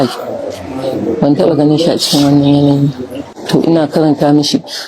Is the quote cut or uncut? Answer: cut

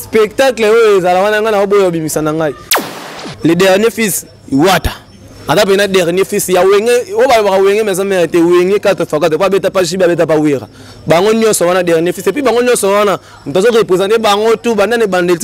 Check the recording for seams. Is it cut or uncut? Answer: cut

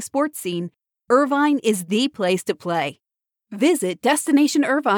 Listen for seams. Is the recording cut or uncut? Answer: uncut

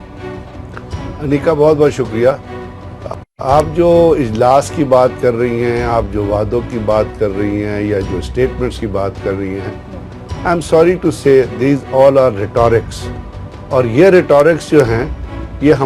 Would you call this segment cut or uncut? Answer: cut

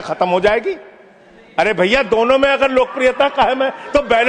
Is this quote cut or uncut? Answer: uncut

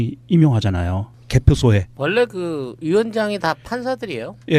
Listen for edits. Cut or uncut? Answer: uncut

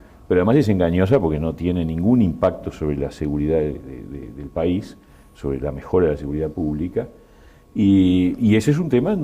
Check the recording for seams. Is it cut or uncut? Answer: cut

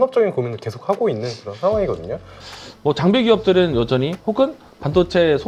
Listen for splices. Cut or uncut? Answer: cut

